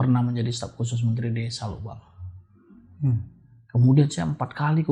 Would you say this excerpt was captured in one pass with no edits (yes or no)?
yes